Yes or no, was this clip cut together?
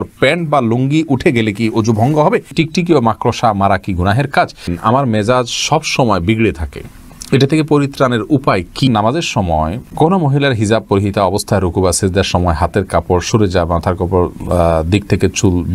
yes